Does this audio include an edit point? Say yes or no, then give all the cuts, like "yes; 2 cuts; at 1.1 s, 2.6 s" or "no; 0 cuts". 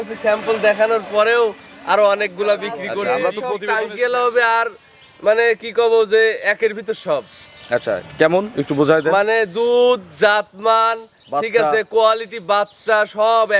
yes; 1 cut; at 3.5 s